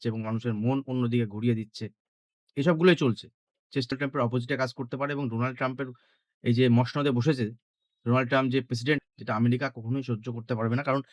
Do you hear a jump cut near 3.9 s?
yes; 2 cuts; at 3.9 s, 9.0 s

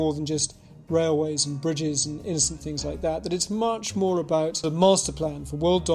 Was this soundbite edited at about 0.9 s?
no; 1 cut; at 4.6 s

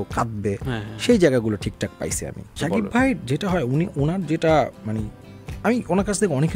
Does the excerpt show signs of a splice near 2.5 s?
yes; 1 cut; at 2.5 s

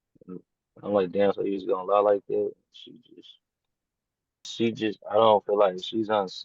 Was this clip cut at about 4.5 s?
yes; 1 cut; at 4.5 s

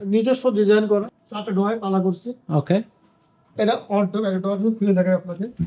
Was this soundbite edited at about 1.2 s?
yes; 1 cut; at 1.2 s

